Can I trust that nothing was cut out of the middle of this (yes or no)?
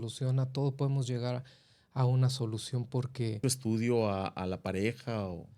no